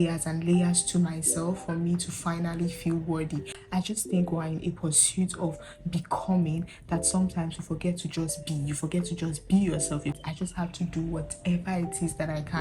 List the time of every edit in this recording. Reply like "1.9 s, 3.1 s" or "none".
3.6 s, 10.2 s